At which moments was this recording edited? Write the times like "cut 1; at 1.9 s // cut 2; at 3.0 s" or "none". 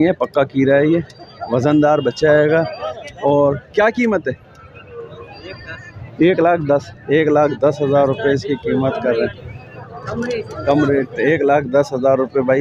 none